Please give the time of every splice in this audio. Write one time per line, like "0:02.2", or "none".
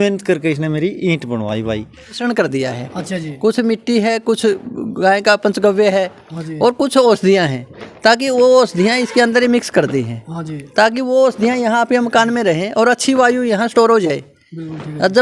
0:02.2